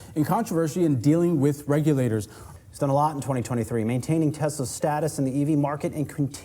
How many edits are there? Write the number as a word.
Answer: one